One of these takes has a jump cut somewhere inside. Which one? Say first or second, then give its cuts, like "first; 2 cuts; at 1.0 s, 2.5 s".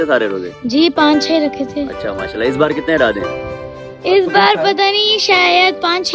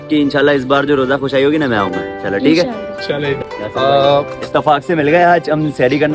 second; 1 cut; at 3.4 s